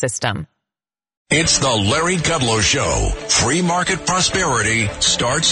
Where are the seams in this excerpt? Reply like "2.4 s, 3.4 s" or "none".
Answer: 1.3 s